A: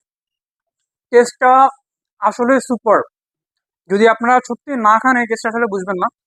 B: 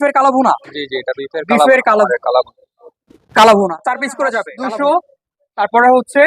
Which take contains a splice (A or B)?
B